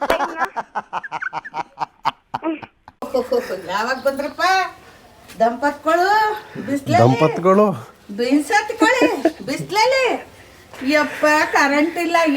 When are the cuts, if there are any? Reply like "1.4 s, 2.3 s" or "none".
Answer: 3.0 s